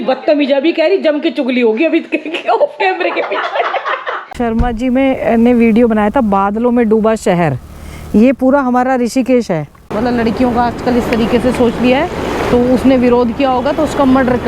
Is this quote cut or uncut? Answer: cut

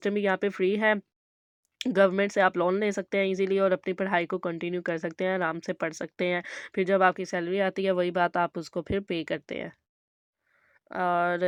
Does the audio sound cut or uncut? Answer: uncut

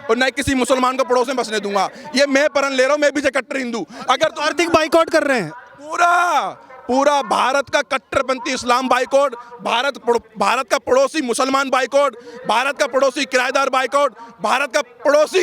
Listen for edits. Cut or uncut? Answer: uncut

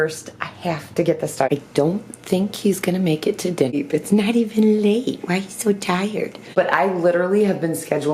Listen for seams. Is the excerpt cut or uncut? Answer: cut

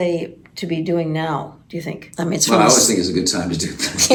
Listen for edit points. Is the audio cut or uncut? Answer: uncut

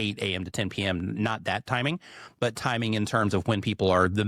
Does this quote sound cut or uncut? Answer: uncut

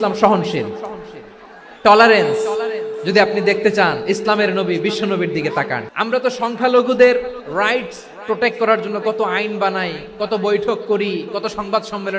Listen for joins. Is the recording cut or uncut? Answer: cut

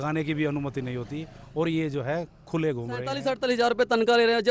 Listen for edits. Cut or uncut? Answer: cut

